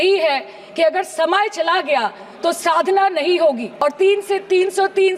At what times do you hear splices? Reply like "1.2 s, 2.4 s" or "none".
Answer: 3.7 s